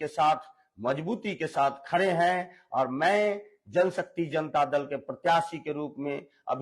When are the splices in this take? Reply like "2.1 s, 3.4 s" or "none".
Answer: none